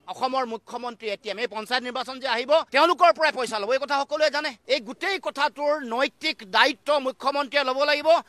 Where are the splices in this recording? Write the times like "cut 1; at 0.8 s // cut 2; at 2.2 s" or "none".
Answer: cut 1; at 4.6 s